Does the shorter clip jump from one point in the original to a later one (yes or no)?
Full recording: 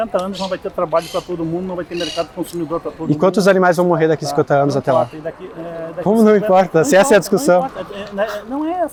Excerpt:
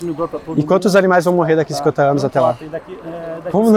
no